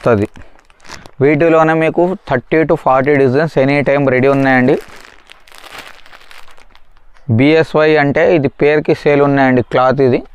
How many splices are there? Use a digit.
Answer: 0